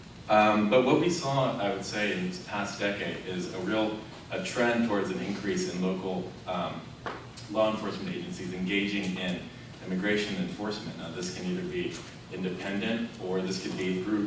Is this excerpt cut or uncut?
uncut